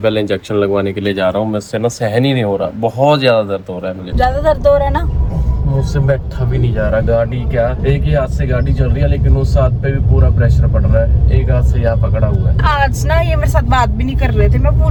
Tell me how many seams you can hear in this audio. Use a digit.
0